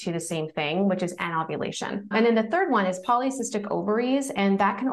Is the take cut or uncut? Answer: cut